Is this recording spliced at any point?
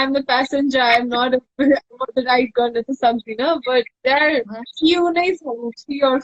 no; 0 cuts

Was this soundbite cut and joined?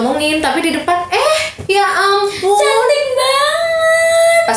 no; 0 cuts

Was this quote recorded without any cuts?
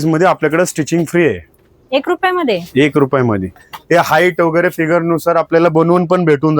no; 1 cut; at 3.6 s

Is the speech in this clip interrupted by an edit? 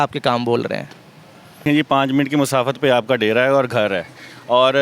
yes; 1 cut; at 1.4 s

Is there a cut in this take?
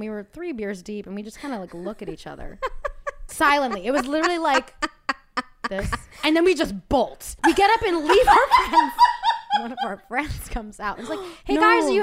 yes; 4 cuts; at 3.3 s, 6.2 s, 7.2 s, 9.8 s

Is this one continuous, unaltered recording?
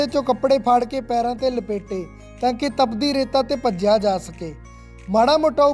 yes; 0 cuts

